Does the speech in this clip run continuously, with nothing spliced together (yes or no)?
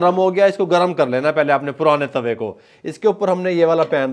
yes